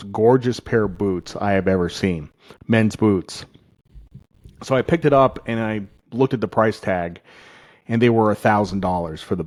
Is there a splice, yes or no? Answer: no